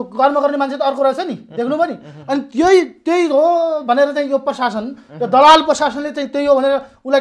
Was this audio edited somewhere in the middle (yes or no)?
no